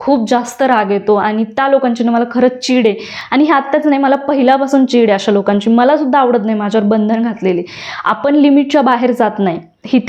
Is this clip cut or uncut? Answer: uncut